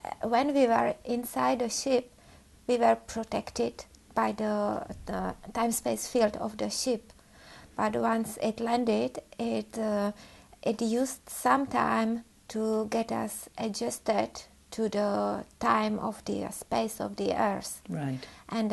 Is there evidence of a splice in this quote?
yes; 1 cut; at 13.6 s

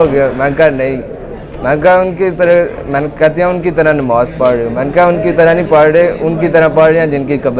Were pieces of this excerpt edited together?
no; 0 cuts

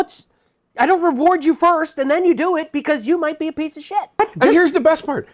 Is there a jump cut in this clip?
yes; 1 cut; at 4.2 s

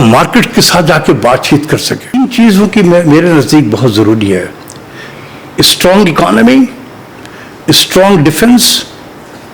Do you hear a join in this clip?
yes; 1 cut; at 2.2 s

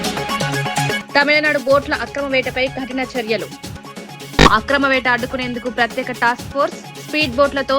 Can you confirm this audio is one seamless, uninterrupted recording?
no; 1 cut; at 1.0 s

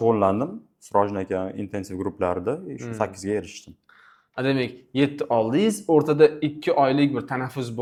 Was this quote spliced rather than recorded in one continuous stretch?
no; 0 cuts

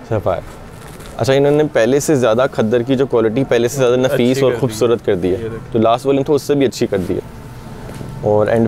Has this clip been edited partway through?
no; 0 cuts

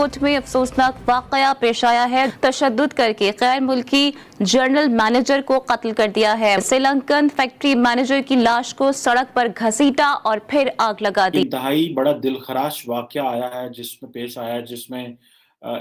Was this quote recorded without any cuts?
no; 3 cuts; at 2.3 s, 6.6 s, 11.4 s

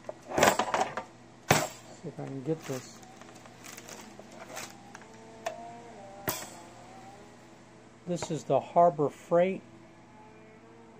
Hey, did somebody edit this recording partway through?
no; 0 cuts

